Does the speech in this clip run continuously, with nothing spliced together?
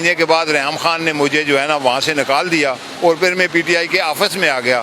yes; 0 cuts

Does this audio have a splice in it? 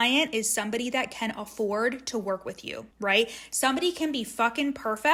no; 0 cuts

